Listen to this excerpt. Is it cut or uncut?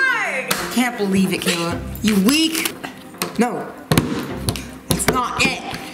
cut